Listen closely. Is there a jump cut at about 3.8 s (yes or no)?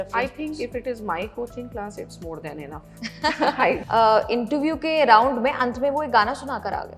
yes